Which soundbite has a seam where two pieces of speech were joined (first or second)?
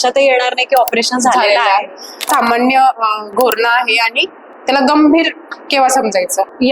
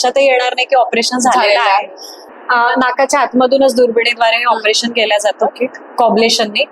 first